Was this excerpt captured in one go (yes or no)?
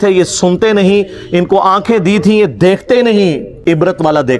yes